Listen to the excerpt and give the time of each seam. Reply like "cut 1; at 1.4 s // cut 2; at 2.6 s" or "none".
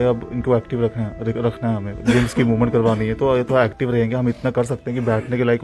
none